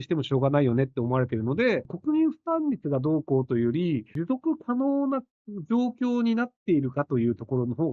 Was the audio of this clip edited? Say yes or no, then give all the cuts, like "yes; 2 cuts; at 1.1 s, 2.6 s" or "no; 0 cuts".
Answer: yes; 2 cuts; at 1.9 s, 4.1 s